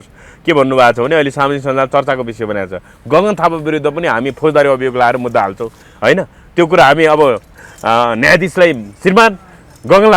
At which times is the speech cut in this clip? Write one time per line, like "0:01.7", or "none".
none